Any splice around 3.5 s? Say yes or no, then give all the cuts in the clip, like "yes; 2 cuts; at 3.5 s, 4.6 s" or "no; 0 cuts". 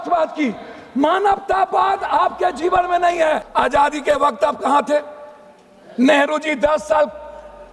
yes; 1 cut; at 3.5 s